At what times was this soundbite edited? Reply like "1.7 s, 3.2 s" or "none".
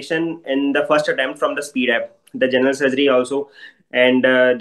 none